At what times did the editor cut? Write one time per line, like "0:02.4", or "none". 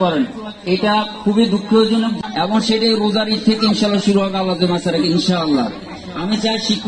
0:02.2